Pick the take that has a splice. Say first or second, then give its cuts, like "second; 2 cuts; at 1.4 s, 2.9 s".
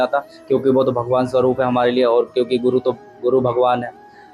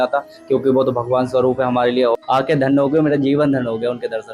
second; 1 cut; at 2.2 s